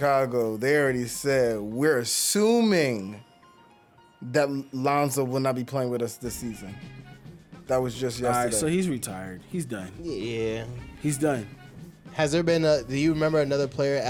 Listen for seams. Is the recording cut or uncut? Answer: uncut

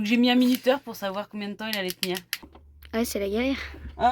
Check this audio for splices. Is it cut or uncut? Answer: cut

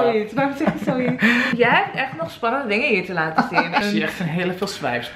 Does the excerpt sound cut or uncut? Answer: cut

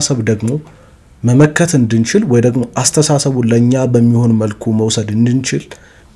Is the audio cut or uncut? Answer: uncut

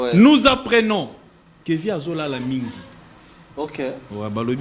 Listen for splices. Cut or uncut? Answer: uncut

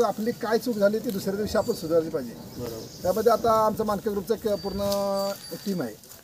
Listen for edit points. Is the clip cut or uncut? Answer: uncut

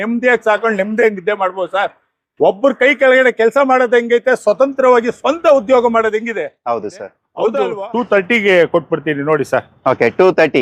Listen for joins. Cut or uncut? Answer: cut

